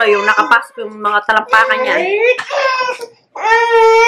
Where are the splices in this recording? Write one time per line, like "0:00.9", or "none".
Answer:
none